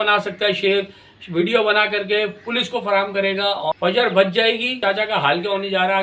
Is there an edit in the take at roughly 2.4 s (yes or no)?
no